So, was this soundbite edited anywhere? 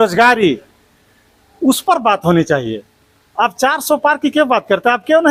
no; 0 cuts

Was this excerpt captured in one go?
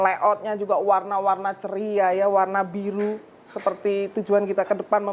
yes; 0 cuts

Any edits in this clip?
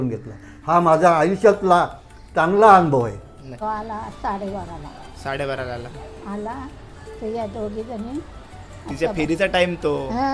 yes; 1 cut; at 3.4 s

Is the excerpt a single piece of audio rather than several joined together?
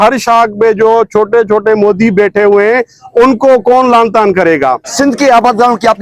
no; 1 cut; at 4.9 s

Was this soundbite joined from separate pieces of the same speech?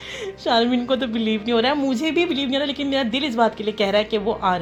no; 0 cuts

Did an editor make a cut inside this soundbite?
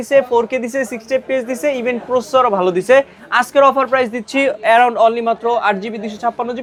no; 0 cuts

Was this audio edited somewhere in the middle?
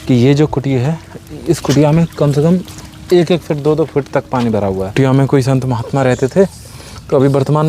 yes; 1 cut; at 4.9 s

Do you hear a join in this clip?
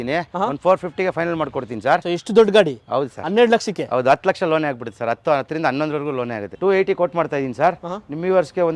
yes; 2 cuts; at 2.0 s, 6.5 s

